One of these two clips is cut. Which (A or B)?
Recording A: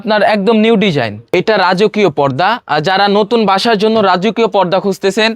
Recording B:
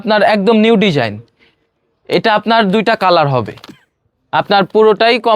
A